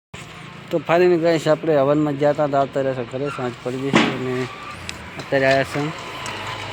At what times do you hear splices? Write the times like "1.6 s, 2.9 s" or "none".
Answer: none